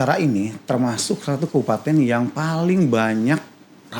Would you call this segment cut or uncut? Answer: uncut